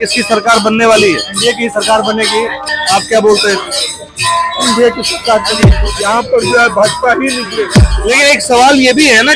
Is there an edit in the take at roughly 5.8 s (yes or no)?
yes